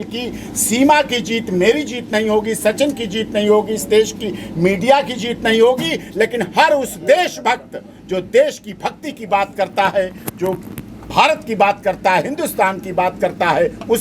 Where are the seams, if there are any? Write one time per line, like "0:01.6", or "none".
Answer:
none